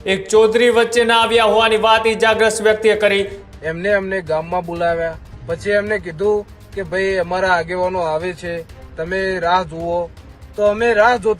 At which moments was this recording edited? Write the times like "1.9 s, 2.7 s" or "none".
3.4 s